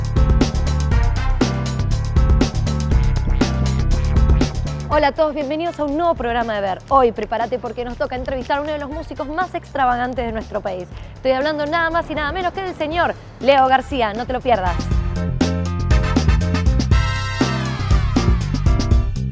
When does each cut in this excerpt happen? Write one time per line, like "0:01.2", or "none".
none